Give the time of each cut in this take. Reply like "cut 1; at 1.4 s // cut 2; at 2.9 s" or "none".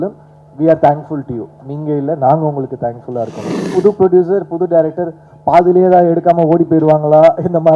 cut 1; at 3.6 s